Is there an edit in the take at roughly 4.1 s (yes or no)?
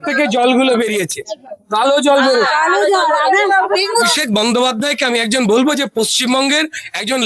yes